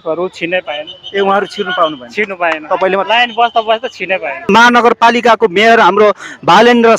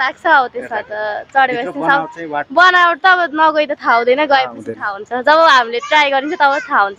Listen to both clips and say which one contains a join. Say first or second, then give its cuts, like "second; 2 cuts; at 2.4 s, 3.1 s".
first; 1 cut; at 4.5 s